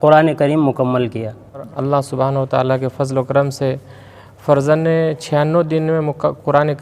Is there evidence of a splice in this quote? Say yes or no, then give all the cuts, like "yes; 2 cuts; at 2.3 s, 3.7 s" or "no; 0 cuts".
yes; 1 cut; at 1.7 s